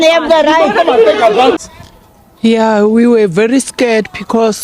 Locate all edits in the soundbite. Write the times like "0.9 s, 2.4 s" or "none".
1.6 s